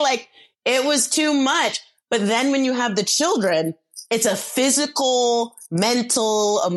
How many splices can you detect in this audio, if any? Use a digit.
0